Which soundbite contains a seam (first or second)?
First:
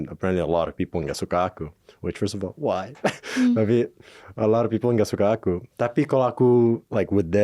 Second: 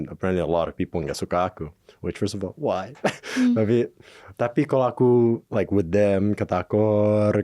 second